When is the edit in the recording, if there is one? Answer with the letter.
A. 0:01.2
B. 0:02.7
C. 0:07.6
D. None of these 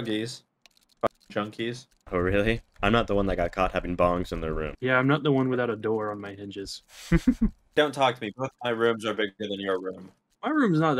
C